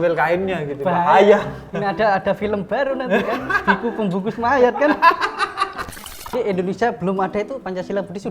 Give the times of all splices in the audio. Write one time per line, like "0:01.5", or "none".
0:06.3